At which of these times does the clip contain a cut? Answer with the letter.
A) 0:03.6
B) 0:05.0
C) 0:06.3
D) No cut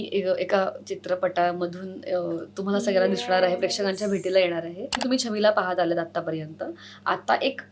B